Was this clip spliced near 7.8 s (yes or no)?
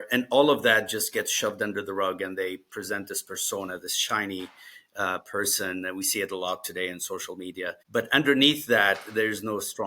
yes